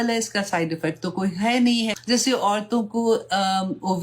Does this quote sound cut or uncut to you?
cut